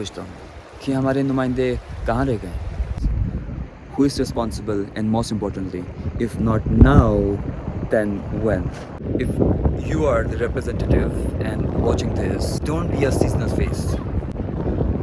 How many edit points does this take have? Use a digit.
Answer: 3